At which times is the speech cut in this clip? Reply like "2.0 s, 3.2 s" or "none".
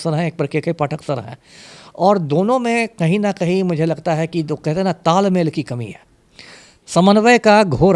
none